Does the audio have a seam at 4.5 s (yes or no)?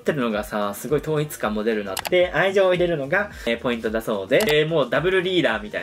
yes